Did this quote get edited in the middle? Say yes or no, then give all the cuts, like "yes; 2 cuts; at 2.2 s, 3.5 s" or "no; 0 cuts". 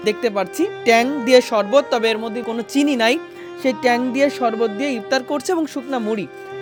no; 0 cuts